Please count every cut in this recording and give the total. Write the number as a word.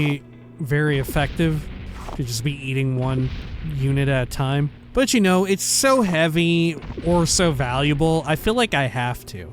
one